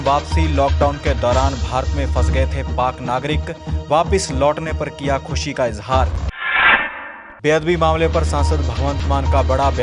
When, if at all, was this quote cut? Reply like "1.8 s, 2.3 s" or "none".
none